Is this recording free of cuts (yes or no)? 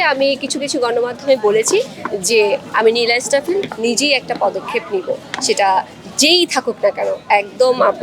yes